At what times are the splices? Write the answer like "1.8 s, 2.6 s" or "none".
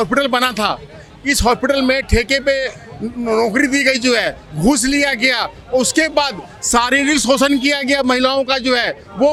none